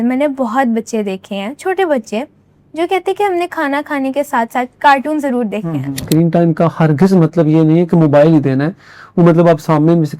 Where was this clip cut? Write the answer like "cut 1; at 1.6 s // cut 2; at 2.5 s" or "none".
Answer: cut 1; at 6.0 s